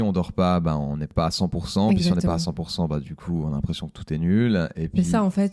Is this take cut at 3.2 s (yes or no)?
no